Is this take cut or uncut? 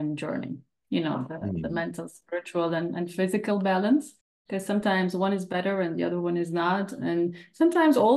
uncut